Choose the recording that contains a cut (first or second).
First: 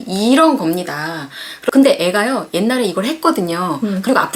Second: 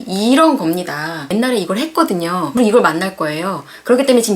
second